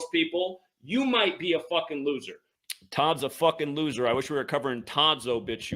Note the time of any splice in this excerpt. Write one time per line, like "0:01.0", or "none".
0:02.5